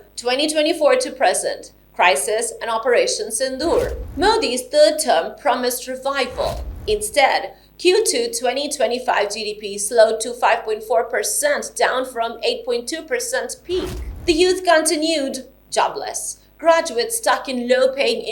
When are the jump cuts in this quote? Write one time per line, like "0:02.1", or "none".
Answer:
none